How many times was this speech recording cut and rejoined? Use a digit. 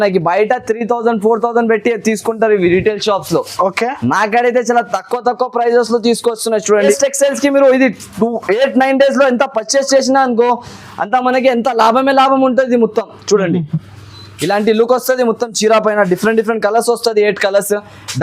1